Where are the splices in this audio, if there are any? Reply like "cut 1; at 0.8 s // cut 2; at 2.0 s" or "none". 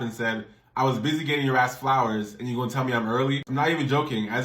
cut 1; at 3.5 s